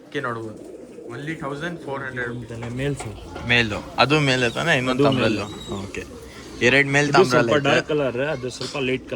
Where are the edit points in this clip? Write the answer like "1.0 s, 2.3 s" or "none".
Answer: 2.3 s